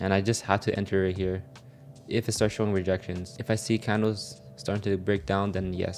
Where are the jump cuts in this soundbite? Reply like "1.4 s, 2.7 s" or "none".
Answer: none